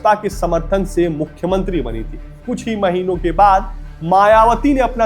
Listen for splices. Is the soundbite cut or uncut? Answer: cut